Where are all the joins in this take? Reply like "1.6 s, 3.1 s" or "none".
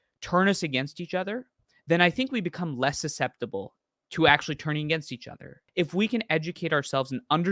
5.6 s

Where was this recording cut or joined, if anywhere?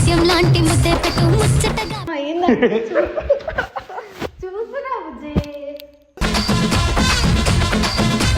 2.0 s

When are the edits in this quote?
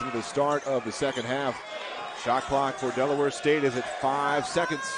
1.7 s

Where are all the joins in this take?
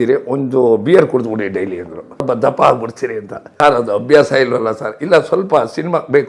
2.2 s, 3.4 s

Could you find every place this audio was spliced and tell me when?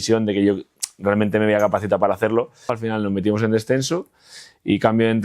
2.7 s

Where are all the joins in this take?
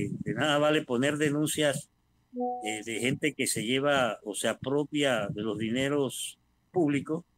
none

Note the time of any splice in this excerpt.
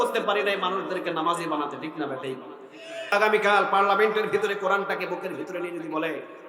3.1 s

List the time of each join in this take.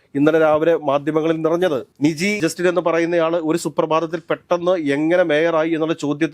none

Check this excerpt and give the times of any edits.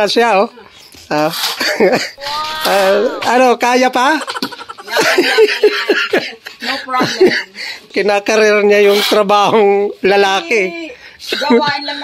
7.9 s

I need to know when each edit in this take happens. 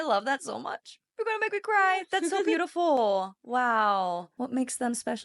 4.3 s

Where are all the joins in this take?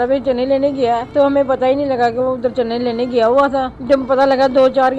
1.1 s, 3.7 s

